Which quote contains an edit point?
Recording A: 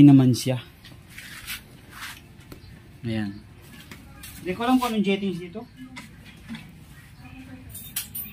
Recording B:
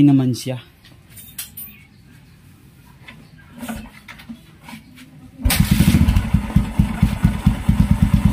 B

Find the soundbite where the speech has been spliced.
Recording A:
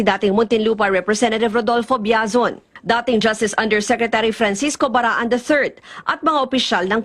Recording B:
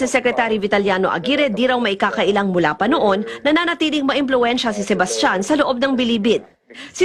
A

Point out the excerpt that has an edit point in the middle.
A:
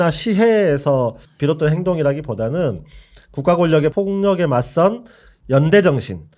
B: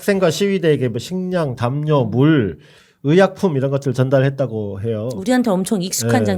A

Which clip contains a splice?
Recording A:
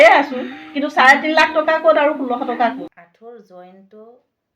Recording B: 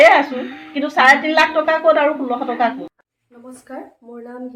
A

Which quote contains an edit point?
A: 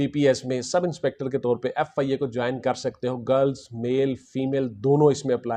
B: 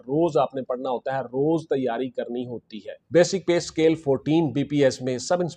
B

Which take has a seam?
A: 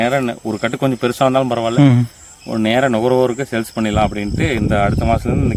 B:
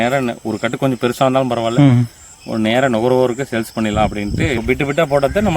B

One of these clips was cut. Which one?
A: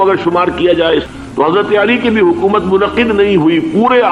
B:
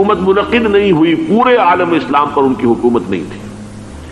A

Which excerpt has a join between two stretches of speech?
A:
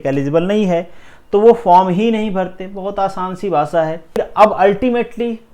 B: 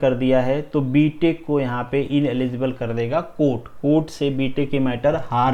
A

